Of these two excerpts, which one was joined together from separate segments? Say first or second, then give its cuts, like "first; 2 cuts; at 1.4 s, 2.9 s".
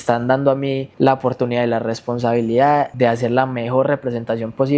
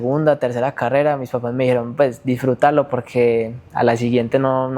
first; 2 cuts; at 0.9 s, 2.9 s